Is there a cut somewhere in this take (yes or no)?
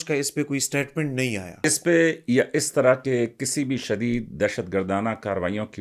yes